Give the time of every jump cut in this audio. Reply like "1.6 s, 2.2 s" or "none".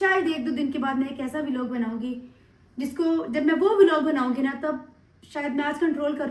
none